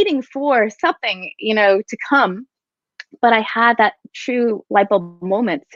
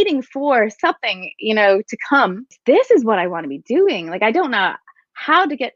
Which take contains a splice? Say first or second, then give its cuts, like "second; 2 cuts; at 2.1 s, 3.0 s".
second; 1 cut; at 2.5 s